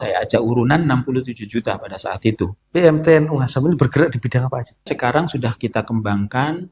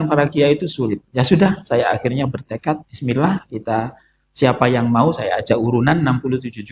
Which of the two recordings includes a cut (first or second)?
first